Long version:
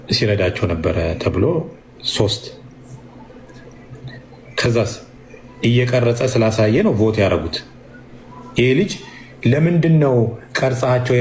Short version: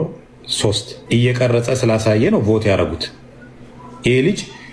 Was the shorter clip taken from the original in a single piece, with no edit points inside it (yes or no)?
no